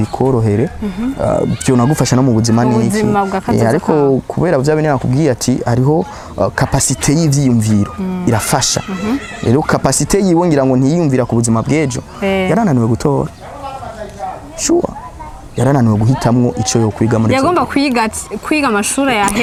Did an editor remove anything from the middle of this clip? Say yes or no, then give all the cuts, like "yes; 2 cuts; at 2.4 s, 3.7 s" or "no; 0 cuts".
no; 0 cuts